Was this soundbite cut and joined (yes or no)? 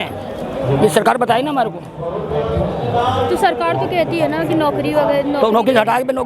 no